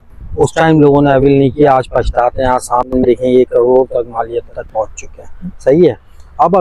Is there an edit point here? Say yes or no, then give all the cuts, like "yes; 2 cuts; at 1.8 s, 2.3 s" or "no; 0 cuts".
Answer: no; 0 cuts